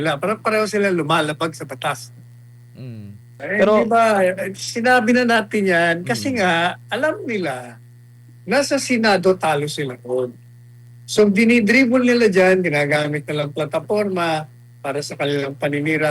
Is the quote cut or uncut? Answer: cut